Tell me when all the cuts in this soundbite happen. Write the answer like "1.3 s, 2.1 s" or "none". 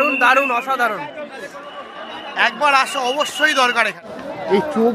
4.0 s